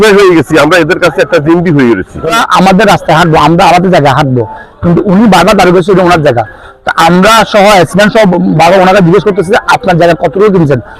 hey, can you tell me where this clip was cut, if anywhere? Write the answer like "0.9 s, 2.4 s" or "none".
none

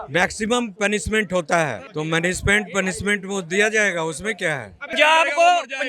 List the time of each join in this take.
1.8 s, 4.9 s

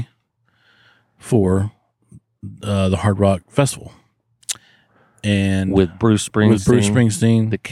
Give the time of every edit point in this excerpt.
none

